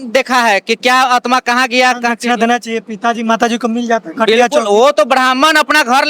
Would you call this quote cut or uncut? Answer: uncut